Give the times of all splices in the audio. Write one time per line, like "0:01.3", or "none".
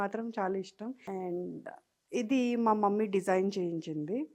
0:01.0